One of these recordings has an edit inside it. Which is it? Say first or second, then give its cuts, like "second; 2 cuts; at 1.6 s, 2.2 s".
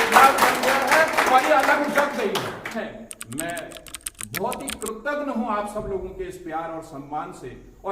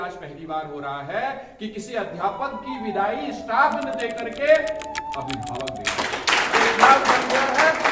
first; 1 cut; at 2.8 s